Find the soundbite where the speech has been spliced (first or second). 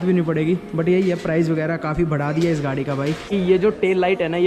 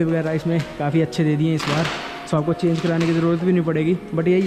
first